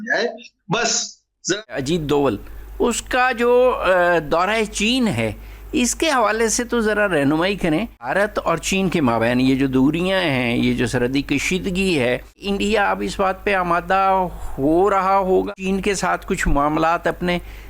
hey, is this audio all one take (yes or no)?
no